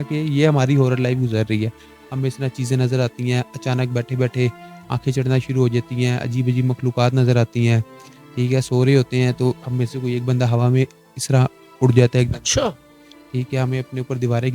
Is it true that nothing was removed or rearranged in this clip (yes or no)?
yes